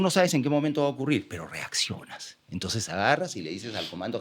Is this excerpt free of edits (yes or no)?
yes